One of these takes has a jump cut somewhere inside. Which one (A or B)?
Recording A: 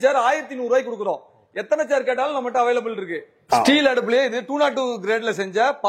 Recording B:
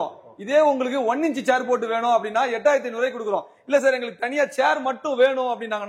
A